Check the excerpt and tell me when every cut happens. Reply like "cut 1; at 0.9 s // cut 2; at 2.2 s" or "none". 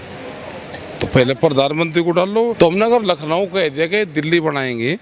cut 1; at 2.5 s